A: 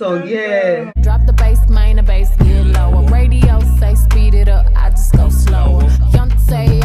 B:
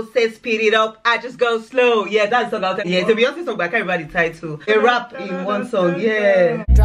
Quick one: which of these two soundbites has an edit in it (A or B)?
B